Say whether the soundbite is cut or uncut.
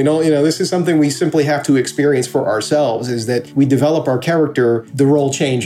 cut